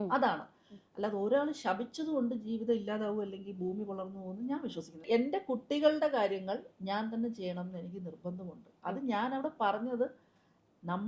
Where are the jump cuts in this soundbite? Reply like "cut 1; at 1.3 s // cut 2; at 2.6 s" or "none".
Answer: cut 1; at 5.0 s